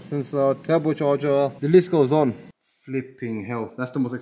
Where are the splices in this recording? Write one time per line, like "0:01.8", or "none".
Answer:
0:01.6
0:02.5